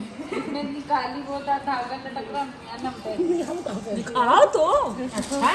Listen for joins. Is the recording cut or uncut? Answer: uncut